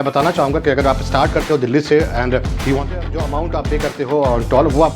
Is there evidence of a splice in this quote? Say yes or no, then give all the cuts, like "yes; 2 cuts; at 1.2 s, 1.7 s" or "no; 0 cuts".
yes; 1 cut; at 2.8 s